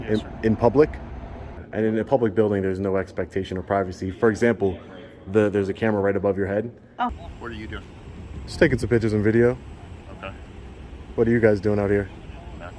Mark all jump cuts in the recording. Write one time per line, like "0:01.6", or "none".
0:01.6
0:07.1